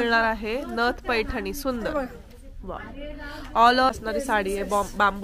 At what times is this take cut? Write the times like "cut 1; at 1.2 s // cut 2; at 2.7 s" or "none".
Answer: cut 1; at 3.9 s